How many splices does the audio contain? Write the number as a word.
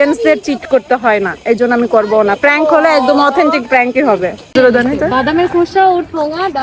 one